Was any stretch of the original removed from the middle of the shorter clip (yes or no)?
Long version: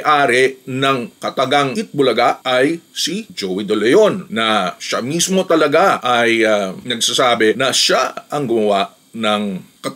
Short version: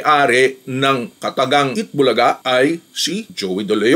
no